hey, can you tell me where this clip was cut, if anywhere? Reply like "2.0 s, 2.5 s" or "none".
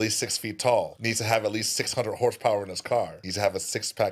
1.0 s, 3.2 s